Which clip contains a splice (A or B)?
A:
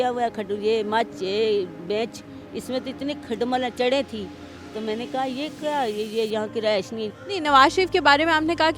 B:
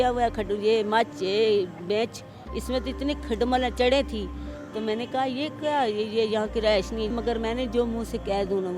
B